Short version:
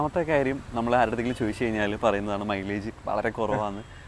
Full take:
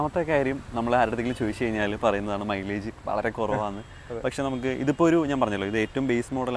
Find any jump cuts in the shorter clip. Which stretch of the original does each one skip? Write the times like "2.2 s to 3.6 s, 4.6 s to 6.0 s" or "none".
none